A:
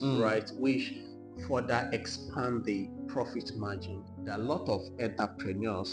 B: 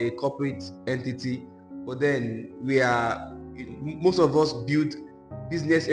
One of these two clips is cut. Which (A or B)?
A